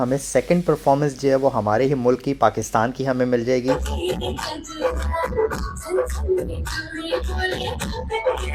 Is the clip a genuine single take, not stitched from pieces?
yes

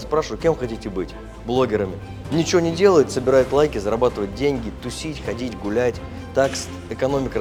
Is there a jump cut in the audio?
no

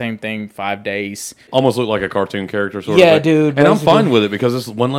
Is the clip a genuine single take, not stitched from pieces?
no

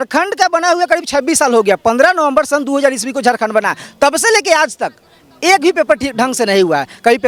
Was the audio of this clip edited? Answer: no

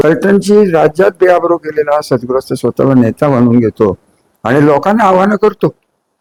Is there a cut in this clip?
no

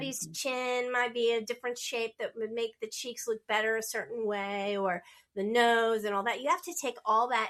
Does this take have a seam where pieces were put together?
no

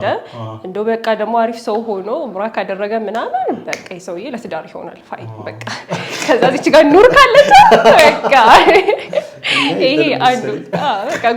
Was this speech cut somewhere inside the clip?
no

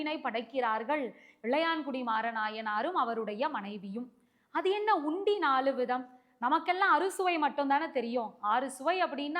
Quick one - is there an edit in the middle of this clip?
no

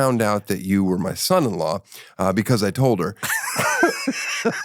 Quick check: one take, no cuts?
no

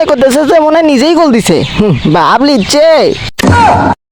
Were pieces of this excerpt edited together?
no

